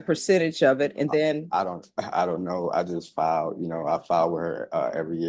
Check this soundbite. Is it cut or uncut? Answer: uncut